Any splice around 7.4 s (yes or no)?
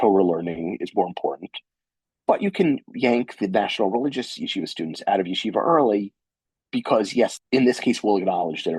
yes